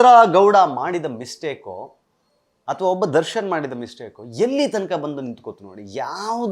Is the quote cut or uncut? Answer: uncut